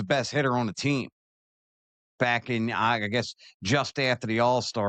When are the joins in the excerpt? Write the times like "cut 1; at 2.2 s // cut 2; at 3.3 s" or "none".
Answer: none